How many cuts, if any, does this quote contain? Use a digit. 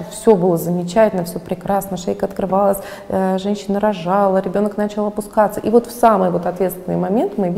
0